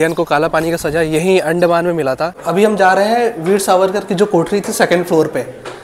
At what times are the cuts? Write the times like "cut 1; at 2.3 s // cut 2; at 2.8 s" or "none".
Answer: cut 1; at 2.3 s